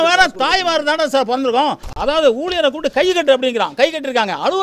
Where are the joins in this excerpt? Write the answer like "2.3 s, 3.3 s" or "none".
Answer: 1.9 s